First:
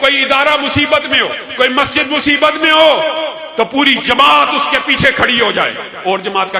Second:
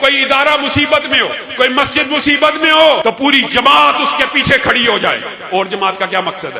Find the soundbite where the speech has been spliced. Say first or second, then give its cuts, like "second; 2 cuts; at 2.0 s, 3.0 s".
second; 1 cut; at 3.0 s